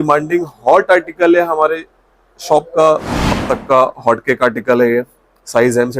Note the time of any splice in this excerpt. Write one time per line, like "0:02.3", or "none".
0:03.1